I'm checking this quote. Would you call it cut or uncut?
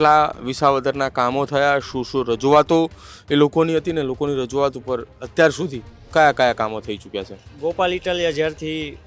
uncut